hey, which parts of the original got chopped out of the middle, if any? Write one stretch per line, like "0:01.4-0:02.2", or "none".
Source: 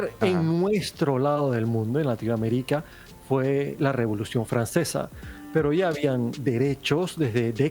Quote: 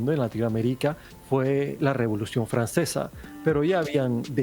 0:03.0-0:03.1
0:05.2-0:05.3